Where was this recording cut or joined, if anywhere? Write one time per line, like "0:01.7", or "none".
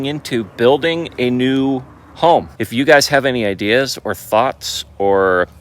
0:02.6